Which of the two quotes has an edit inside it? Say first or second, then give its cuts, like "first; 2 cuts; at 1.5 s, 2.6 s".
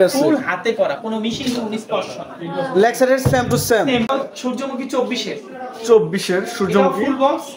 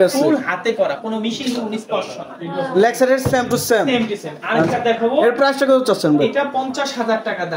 first; 1 cut; at 4.1 s